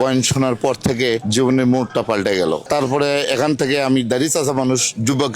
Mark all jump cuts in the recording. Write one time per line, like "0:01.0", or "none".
0:02.6